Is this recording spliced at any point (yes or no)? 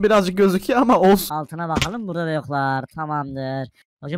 yes